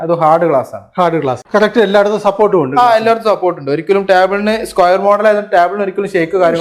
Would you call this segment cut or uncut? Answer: cut